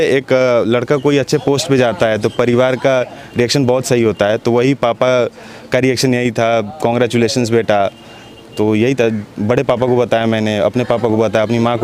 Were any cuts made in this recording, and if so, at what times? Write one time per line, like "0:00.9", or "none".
none